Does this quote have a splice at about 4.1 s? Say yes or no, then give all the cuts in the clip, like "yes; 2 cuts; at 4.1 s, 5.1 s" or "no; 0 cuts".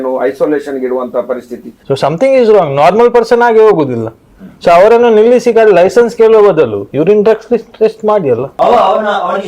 no; 2 cuts; at 1.7 s, 8.5 s